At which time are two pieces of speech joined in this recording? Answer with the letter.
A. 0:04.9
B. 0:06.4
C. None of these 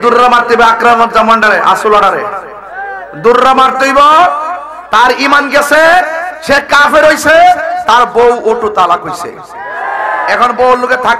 C